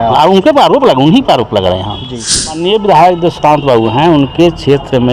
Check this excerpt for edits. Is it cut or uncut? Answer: cut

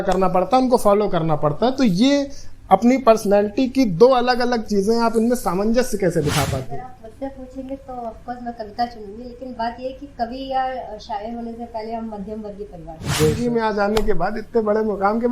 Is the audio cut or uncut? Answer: cut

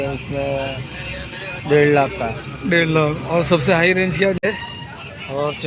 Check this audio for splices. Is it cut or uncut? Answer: cut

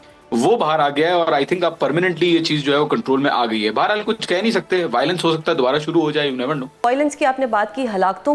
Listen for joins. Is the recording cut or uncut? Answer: cut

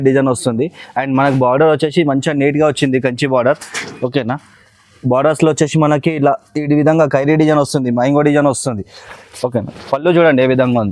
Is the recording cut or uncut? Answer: uncut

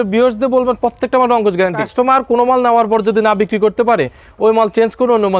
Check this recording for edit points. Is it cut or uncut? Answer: cut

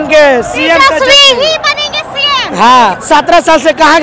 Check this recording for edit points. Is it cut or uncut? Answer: cut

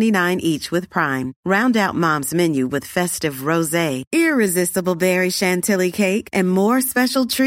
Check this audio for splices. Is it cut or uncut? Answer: uncut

